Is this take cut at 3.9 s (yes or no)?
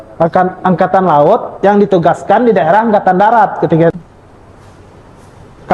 yes